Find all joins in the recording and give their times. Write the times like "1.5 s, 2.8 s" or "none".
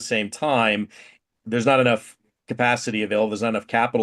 1.2 s